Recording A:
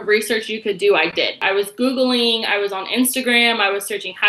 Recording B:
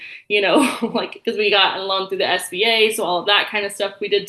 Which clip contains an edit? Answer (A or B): A